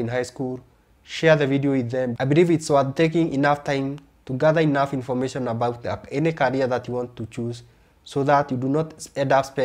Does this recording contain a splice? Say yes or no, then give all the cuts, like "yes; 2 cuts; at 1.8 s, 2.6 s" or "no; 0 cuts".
yes; 1 cut; at 2.2 s